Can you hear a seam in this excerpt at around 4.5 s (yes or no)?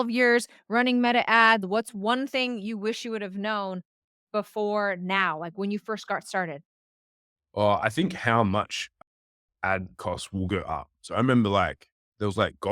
no